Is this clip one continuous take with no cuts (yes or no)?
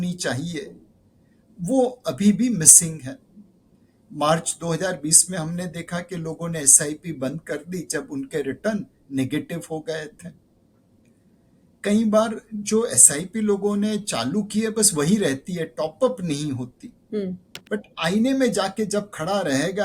no